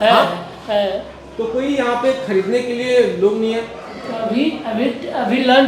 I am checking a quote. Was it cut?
no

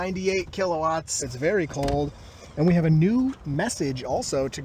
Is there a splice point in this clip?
yes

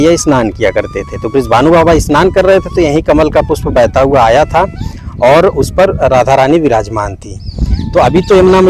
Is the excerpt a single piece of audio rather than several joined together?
yes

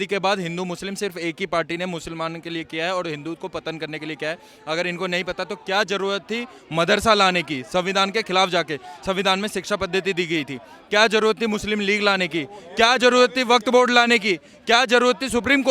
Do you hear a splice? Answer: no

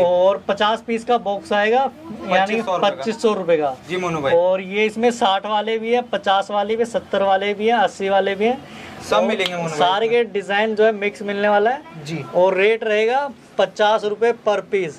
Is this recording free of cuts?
yes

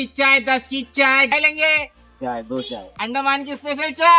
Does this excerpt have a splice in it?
yes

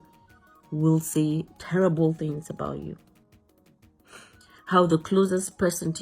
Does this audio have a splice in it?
no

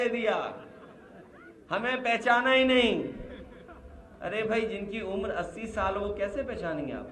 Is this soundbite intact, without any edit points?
yes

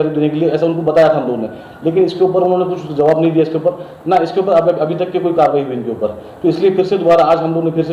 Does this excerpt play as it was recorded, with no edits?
yes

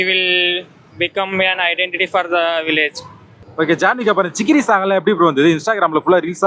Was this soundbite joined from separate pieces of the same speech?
yes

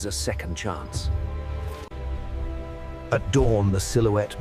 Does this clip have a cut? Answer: no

